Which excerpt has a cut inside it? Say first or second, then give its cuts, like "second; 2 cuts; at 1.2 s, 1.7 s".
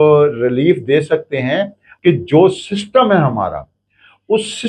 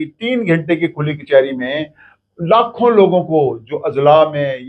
first; 1 cut; at 1.8 s